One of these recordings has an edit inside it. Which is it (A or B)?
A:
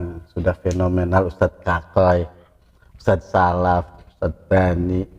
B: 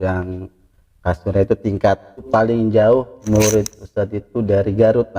B